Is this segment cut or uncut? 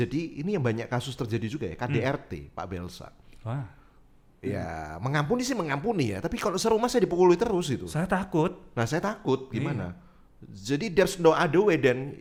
uncut